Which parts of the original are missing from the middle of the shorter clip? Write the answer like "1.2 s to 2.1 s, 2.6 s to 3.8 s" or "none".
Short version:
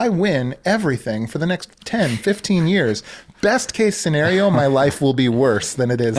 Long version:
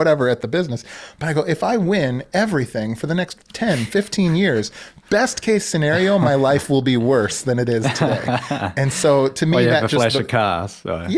none